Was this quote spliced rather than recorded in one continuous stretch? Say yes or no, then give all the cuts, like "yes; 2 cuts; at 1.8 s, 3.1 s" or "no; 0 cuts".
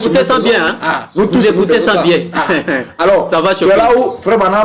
no; 0 cuts